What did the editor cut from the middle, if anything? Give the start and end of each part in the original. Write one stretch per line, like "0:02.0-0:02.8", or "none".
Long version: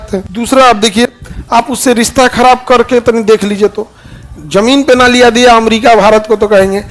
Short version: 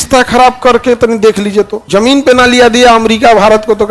0:03.8-0:04.4